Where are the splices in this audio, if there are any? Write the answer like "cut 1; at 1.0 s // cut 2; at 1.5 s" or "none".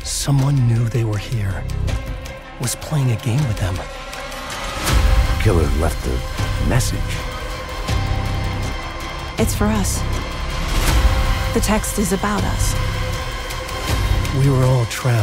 cut 1; at 13.4 s